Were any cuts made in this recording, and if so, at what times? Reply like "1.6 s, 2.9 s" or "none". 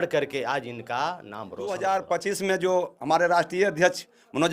1.7 s